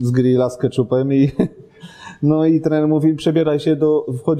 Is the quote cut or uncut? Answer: uncut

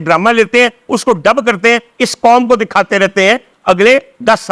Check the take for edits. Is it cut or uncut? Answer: uncut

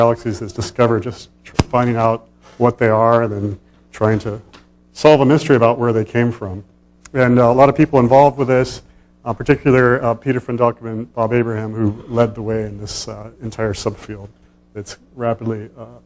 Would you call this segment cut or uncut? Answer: cut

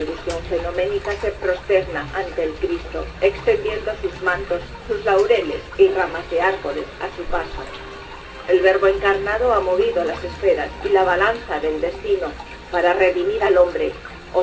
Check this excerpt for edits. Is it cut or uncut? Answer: cut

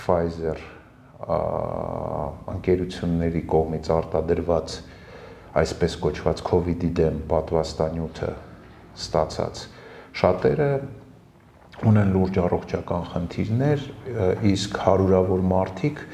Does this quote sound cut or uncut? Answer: uncut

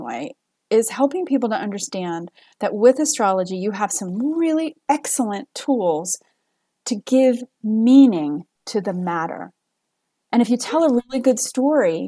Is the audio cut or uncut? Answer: cut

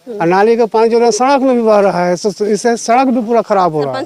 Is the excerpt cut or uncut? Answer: uncut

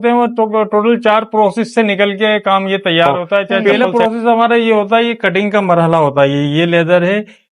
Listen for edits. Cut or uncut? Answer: cut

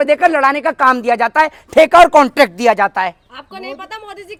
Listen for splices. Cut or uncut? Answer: uncut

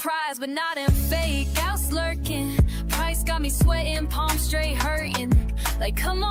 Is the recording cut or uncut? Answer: uncut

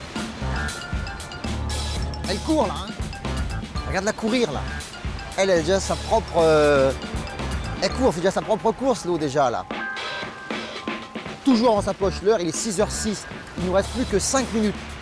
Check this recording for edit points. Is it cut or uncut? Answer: uncut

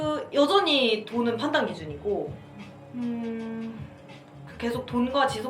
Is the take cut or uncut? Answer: uncut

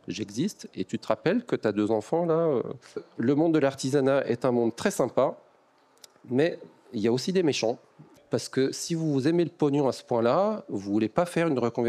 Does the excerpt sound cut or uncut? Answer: cut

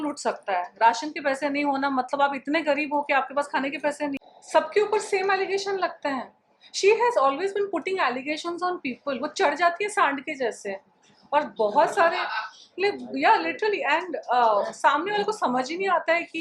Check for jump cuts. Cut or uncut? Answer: uncut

